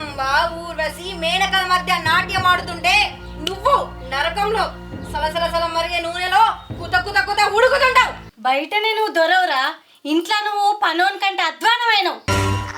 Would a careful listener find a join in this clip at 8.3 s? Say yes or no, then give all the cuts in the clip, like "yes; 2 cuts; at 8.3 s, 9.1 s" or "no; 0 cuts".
yes; 1 cut; at 8.3 s